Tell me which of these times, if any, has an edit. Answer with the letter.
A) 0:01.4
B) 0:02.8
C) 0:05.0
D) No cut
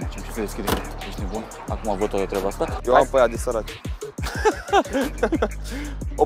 B